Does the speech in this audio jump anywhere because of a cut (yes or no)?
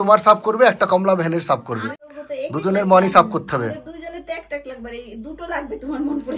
yes